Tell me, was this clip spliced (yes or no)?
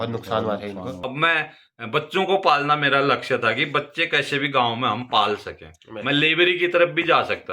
yes